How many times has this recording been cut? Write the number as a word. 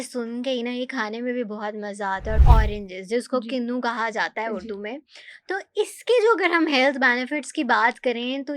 one